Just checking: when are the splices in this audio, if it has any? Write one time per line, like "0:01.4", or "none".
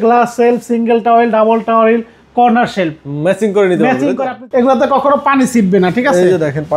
0:04.3